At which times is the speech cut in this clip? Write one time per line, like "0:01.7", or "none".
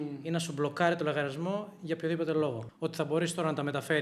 0:02.6